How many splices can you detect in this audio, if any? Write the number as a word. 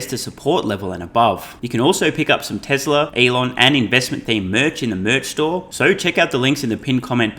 three